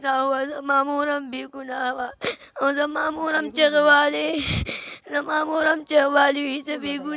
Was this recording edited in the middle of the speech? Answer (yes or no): no